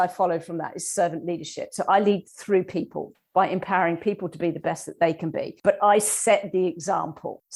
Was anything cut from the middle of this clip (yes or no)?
no